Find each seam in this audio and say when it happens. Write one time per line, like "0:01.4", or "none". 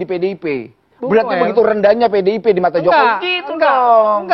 none